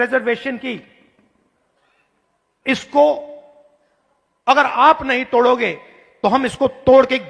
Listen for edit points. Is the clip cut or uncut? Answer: uncut